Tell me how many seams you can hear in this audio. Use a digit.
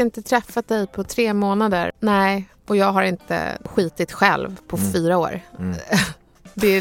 2